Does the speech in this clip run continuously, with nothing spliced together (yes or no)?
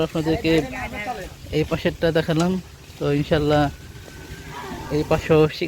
yes